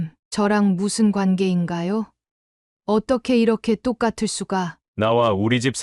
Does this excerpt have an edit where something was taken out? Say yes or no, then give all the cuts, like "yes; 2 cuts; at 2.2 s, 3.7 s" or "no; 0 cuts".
yes; 1 cut; at 4.8 s